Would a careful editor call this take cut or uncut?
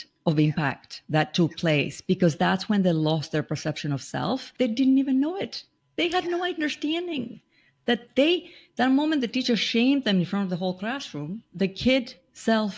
cut